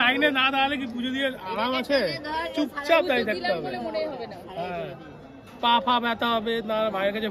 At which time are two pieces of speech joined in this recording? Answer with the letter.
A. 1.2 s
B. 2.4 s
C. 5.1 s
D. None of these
D